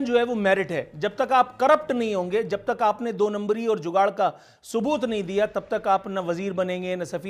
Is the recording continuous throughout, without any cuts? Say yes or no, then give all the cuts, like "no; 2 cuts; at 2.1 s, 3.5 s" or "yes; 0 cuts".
yes; 0 cuts